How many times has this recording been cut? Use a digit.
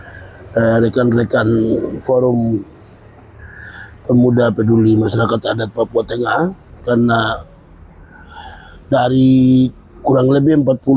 0